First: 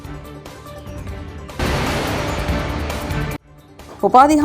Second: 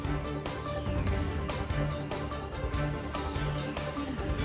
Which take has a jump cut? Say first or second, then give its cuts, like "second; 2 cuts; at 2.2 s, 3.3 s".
first; 1 cut; at 1.1 s